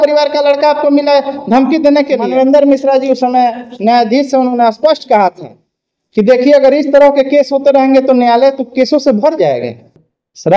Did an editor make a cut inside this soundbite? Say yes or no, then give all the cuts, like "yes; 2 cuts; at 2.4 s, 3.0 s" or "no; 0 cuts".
yes; 1 cut; at 2.2 s